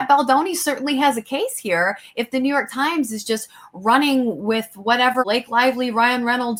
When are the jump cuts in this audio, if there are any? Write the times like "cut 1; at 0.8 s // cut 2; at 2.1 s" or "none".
none